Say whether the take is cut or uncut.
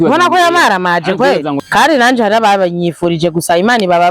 cut